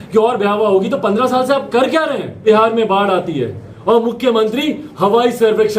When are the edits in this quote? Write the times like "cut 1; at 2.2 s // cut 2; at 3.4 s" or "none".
cut 1; at 2.4 s